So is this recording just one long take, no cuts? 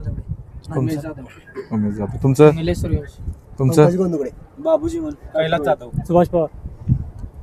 yes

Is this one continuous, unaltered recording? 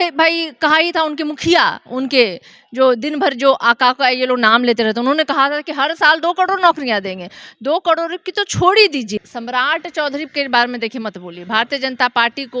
no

